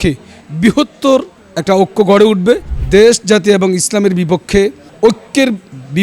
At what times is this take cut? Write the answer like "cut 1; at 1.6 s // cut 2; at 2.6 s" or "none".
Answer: cut 1; at 2.7 s // cut 2; at 4.9 s